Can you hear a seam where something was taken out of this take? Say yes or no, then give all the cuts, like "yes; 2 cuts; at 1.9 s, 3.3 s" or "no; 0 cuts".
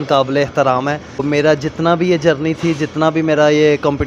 yes; 1 cut; at 1.2 s